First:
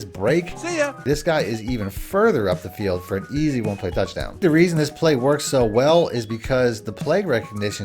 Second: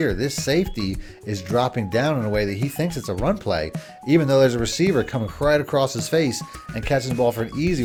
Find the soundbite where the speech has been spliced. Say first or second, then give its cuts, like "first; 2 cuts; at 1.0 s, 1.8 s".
first; 2 cuts; at 1.0 s, 4.4 s